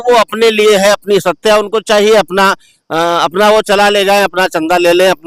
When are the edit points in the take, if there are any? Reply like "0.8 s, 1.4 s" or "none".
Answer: none

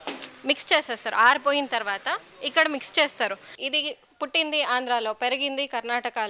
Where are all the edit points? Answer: 3.5 s

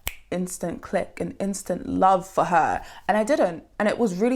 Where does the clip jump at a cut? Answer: none

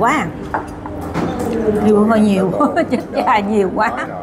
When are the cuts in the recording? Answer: none

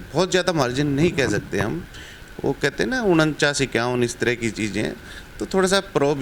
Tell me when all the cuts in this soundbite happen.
none

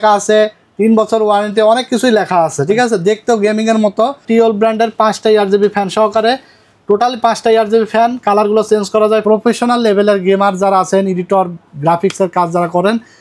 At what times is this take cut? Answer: 4.2 s, 9.2 s

